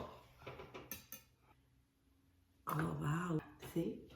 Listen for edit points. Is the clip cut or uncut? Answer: cut